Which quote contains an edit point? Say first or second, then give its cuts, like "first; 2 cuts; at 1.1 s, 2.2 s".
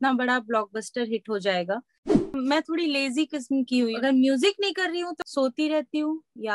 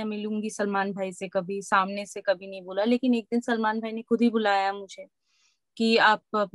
first; 3 cuts; at 2.2 s, 3.9 s, 5.2 s